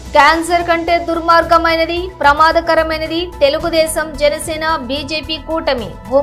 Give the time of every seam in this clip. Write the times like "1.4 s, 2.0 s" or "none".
none